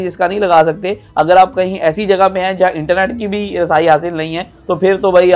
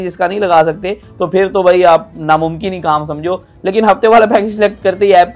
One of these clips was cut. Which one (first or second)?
second